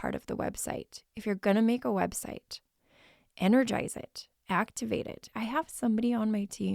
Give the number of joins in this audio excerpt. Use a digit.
1